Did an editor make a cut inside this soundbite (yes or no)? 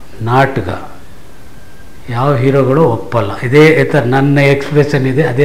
no